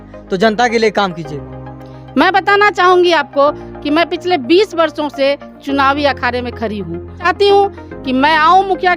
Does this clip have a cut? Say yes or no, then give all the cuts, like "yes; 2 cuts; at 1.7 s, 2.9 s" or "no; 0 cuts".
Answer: yes; 1 cut; at 7.2 s